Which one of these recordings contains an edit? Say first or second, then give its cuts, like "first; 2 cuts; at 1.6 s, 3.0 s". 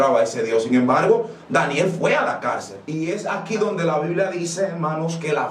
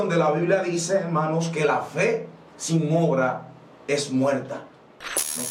first; 1 cut; at 2.8 s